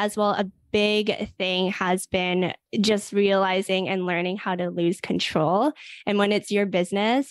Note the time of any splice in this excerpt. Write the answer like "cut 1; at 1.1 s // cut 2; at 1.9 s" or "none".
cut 1; at 2.6 s